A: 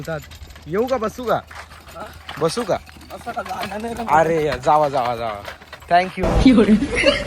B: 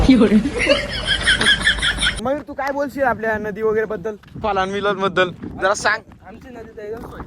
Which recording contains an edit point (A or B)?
B